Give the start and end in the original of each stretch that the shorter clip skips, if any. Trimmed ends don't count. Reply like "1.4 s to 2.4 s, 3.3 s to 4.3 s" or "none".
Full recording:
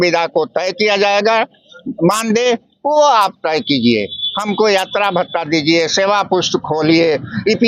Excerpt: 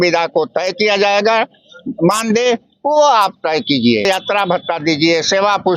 4.1 s to 4.7 s